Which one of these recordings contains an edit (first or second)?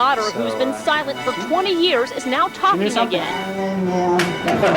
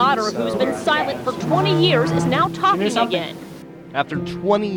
first